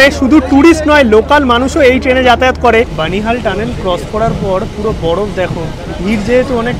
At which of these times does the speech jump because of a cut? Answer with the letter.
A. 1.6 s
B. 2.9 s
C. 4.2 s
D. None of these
B